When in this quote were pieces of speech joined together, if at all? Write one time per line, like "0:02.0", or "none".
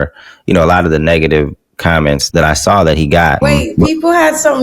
0:02.2
0:03.4